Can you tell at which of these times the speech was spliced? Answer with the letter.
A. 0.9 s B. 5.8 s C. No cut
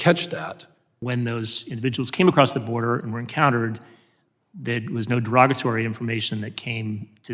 A